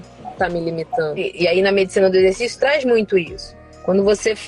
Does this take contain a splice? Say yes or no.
yes